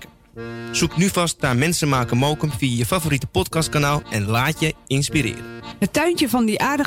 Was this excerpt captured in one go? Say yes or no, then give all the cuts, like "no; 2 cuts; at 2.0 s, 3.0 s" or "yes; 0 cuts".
no; 1 cut; at 5.6 s